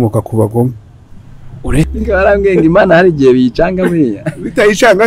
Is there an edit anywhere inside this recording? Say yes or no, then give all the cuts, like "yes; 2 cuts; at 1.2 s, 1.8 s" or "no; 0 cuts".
yes; 1 cut; at 1.9 s